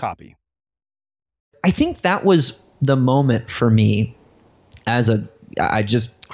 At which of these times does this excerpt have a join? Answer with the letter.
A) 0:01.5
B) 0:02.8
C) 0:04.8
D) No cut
A